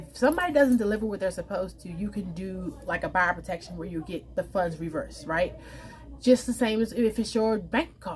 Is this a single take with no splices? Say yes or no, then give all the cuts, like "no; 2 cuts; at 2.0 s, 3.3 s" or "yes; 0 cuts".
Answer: yes; 0 cuts